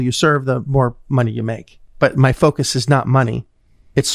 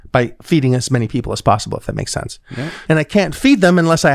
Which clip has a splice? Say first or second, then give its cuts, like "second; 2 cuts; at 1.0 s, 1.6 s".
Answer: second; 1 cut; at 2.7 s